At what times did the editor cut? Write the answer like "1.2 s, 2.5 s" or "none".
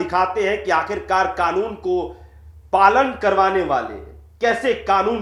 none